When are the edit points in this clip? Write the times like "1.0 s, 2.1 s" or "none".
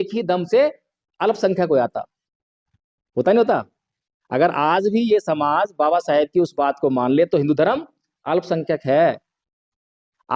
none